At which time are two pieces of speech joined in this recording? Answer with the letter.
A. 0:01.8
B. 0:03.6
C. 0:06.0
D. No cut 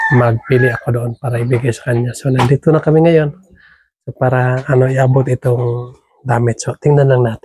D